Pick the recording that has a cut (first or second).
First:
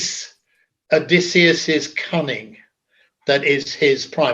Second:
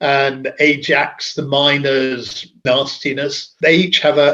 second